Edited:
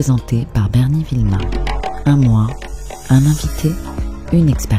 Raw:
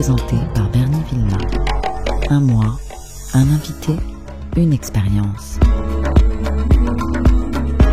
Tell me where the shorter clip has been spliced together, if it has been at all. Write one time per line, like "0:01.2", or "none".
0:02.0